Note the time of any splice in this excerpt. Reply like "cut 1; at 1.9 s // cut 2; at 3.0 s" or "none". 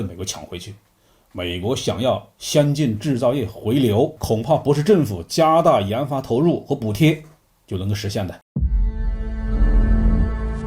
cut 1; at 8.4 s